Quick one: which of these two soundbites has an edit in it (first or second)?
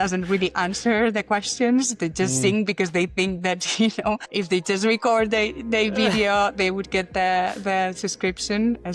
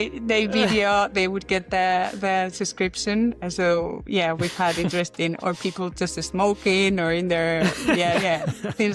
first